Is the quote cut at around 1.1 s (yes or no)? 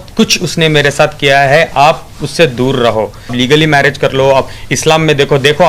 no